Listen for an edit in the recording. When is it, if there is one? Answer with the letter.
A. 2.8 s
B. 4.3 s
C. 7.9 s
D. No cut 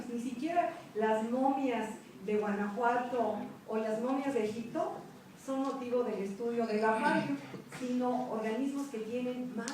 C